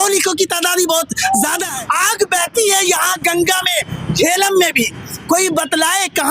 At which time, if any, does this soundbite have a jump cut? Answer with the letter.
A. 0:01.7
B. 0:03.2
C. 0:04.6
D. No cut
A